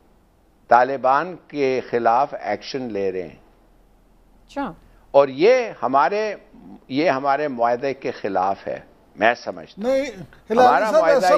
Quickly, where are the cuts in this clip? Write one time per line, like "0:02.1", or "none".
none

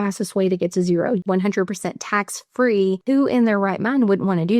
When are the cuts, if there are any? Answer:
0:01.2
0:03.0

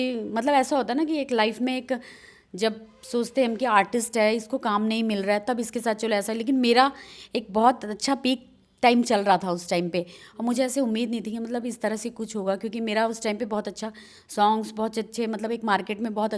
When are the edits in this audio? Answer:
none

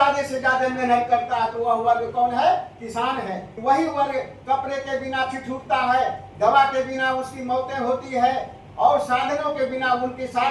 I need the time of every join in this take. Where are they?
0:03.5

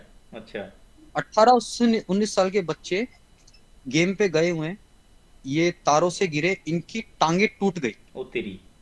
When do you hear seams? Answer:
none

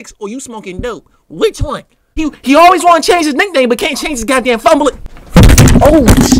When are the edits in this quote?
0:02.0
0:05.1

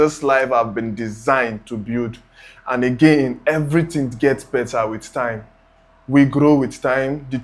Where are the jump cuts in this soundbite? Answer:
none

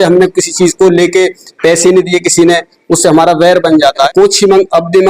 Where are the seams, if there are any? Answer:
0:04.1

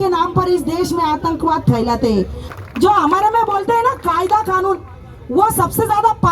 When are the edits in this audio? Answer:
0:02.4

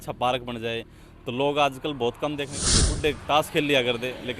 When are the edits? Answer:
0:02.9

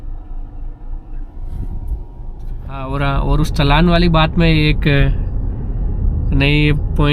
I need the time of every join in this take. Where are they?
0:02.8

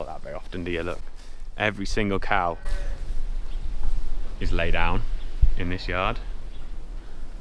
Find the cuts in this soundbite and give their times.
none

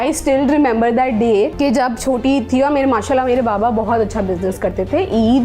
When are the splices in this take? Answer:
0:01.5

